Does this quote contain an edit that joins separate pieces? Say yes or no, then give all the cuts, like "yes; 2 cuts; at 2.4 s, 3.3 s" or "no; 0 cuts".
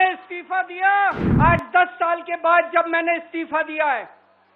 yes; 1 cut; at 1.3 s